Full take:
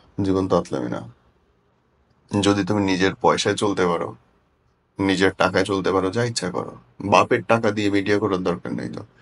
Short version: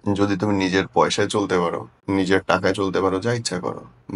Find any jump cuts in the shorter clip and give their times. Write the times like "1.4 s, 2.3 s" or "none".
1.9 s